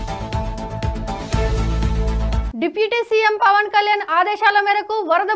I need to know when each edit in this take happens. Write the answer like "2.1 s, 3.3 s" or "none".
2.4 s